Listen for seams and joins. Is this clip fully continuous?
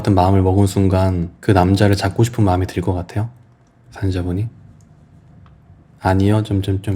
no; 1 cut; at 1.3 s

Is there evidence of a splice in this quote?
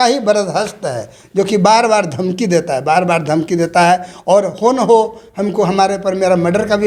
no; 0 cuts

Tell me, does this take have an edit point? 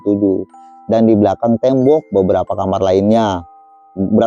no; 0 cuts

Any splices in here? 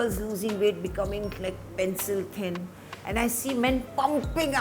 no; 0 cuts

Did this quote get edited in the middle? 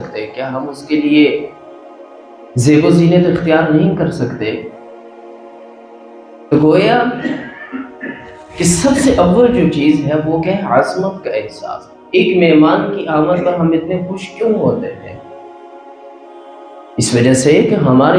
no; 0 cuts

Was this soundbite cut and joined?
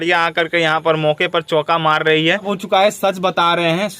yes; 1 cut; at 2.5 s

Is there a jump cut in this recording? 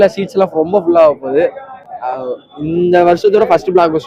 no; 0 cuts

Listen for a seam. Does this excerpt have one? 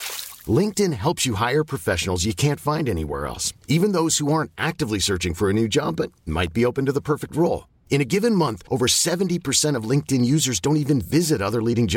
no; 0 cuts

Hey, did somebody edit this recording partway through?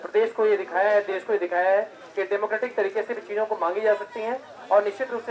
no; 0 cuts

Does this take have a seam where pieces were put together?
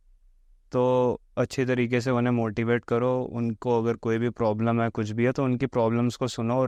no; 0 cuts

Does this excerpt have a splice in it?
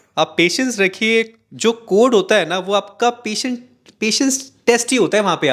no; 0 cuts

